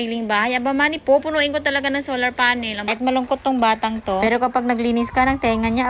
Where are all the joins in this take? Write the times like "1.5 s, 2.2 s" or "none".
2.9 s